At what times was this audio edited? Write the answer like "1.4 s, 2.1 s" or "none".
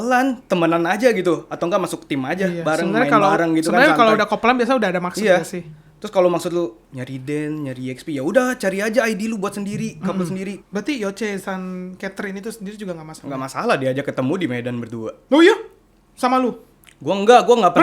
10.6 s

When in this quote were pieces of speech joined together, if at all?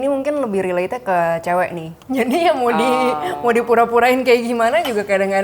1.9 s

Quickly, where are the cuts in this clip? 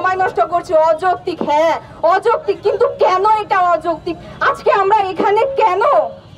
none

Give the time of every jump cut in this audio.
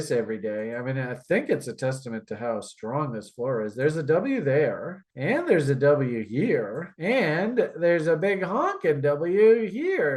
none

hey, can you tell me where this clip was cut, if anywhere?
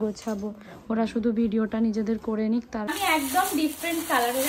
2.9 s

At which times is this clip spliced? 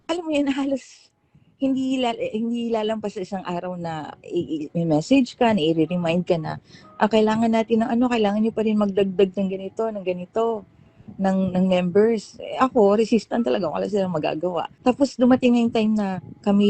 14.7 s

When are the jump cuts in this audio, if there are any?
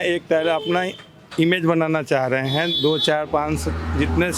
none

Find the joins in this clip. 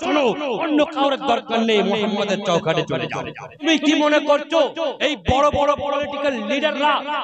3.5 s

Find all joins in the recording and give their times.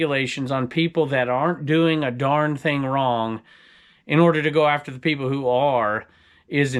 none

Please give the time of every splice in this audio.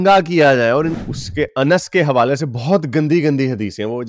0.9 s

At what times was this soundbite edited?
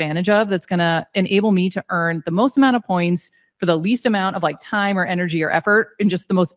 none

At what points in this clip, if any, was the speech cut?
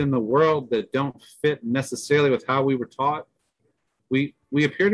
none

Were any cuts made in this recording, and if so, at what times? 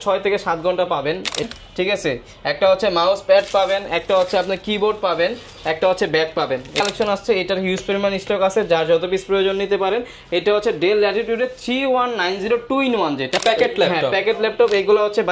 1.4 s, 6.8 s, 13.4 s

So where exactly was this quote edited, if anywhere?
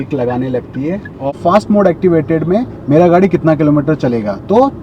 1.3 s

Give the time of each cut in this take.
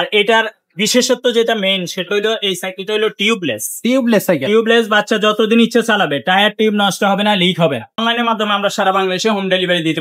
8.0 s

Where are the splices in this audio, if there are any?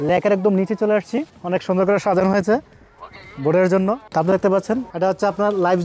4.0 s

